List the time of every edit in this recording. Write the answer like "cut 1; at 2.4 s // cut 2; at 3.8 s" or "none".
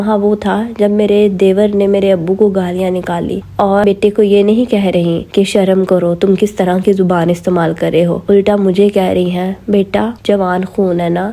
cut 1; at 3.8 s